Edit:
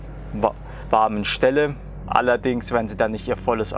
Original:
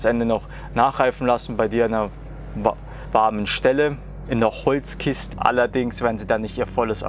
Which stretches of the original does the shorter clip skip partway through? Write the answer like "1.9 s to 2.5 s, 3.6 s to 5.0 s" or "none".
4.2 s to 5.3 s